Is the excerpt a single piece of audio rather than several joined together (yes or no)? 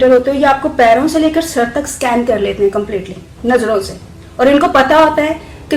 yes